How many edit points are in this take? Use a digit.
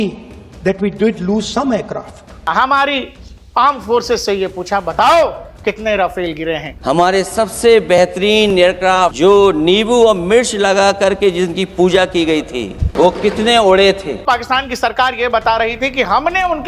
5